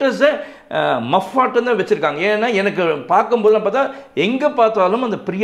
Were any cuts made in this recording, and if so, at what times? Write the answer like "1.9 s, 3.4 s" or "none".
none

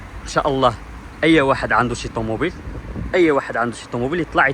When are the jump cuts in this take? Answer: none

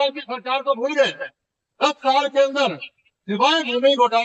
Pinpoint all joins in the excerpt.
none

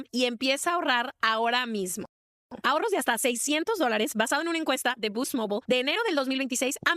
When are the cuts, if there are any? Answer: none

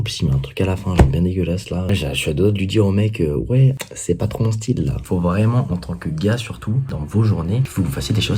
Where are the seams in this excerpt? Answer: 3.9 s, 5.0 s, 6.9 s

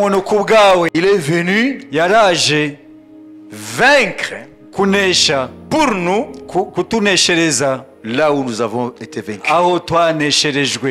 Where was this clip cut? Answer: 0.9 s

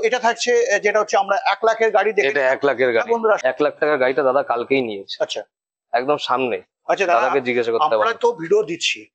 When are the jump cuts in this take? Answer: 3.4 s

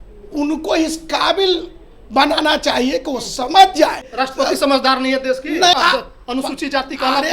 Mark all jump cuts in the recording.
4.1 s, 5.7 s

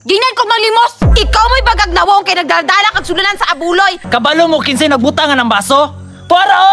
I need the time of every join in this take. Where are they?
4.0 s

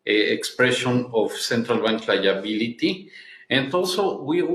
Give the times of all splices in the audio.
none

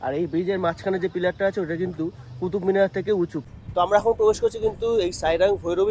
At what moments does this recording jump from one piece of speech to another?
3.4 s

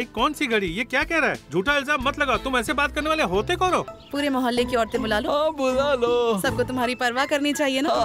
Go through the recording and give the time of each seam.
3.9 s

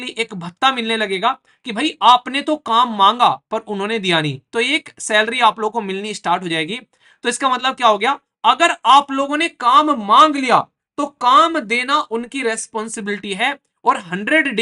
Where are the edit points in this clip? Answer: none

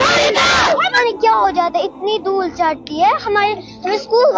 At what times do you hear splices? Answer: 1.0 s

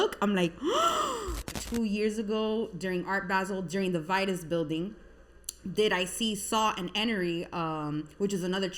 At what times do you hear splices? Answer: 1.5 s

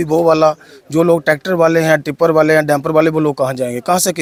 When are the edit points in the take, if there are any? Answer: none

